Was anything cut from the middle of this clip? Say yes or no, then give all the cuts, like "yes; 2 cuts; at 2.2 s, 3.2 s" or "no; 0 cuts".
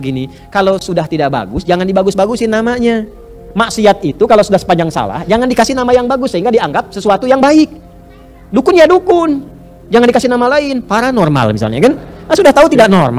no; 0 cuts